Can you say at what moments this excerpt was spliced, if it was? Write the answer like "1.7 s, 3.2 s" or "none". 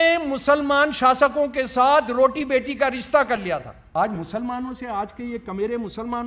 3.8 s